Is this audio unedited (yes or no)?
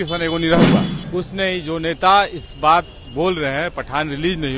no